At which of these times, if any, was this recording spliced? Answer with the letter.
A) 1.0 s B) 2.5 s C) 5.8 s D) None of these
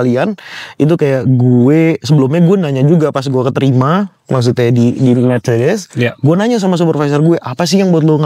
D